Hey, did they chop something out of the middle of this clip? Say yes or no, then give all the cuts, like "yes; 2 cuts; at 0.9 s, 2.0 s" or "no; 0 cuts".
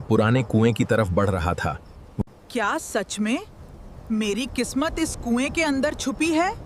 no; 0 cuts